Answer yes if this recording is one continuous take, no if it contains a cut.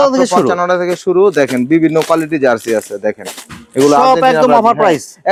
yes